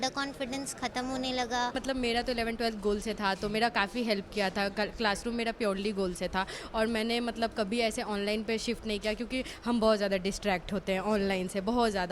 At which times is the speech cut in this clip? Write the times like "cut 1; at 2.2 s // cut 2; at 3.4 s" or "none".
cut 1; at 1.8 s